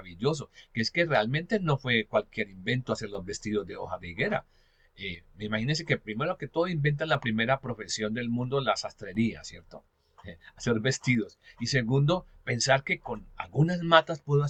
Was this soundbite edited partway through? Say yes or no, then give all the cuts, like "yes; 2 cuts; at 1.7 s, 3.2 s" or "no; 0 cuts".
no; 0 cuts